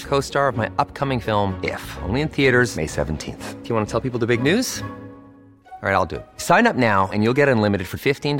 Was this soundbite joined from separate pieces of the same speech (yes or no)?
no